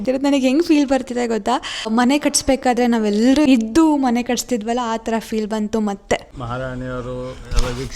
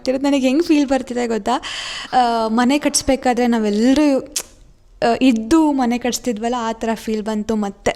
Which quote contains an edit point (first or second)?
first